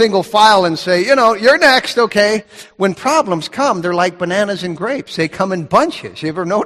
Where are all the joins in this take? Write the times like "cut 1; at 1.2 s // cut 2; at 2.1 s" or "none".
none

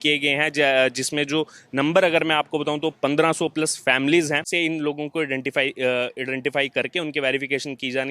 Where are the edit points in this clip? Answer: cut 1; at 4.5 s

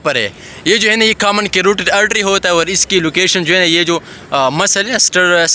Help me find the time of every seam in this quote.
none

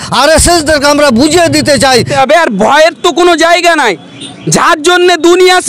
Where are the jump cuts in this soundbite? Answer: cut 1; at 2.1 s

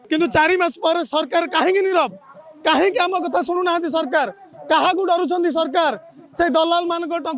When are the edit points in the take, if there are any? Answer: none

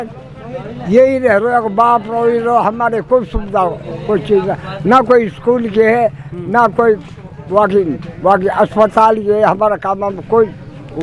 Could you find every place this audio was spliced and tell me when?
none

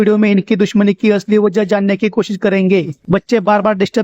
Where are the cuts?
cut 1; at 2.9 s

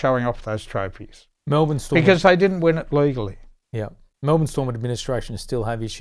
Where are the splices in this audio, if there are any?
none

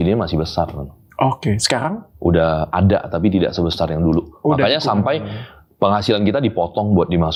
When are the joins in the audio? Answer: none

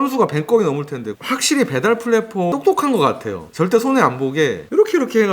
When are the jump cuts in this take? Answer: cut 1; at 1.2 s

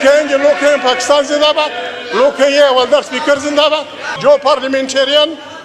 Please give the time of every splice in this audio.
cut 1; at 4.1 s

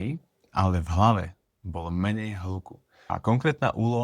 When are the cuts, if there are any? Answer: cut 1; at 3.1 s

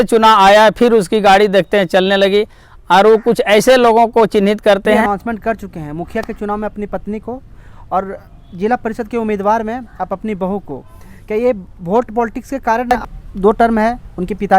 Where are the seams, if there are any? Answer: cut 1; at 5.0 s // cut 2; at 12.9 s

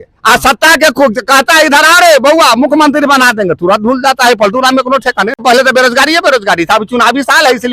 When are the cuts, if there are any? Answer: cut 1; at 5.4 s

